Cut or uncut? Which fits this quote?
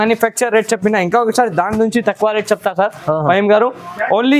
uncut